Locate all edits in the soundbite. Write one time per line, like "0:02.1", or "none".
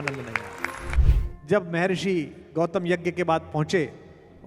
0:01.0